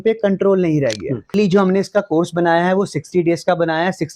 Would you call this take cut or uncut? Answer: cut